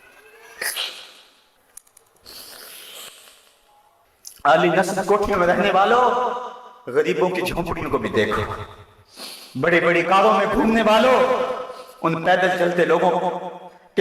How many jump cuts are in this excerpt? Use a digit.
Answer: 1